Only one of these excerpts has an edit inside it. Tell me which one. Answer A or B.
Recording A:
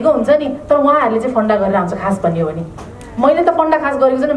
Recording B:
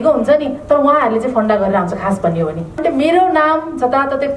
B